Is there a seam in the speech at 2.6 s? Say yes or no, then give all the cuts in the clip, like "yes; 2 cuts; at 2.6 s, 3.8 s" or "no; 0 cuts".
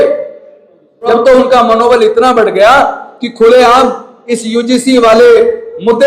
no; 1 cut; at 1.2 s